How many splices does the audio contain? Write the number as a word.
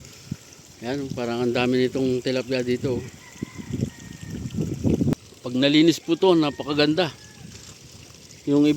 one